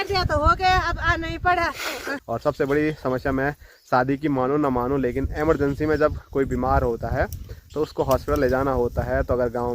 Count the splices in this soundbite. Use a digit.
1